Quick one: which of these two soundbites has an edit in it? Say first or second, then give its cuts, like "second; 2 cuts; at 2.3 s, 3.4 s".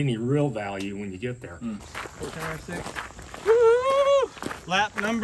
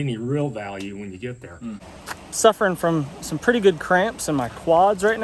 second; 1 cut; at 1.9 s